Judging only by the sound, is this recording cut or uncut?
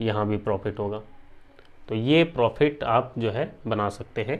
uncut